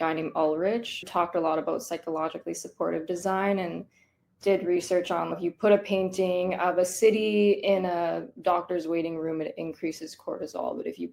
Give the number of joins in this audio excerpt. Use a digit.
1